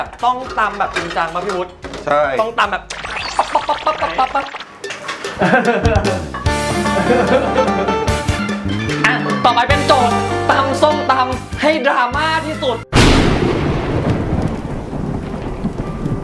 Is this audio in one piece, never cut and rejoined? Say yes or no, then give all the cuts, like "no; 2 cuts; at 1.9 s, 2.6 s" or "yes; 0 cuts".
yes; 0 cuts